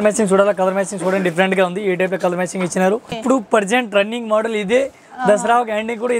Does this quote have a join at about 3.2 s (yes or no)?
yes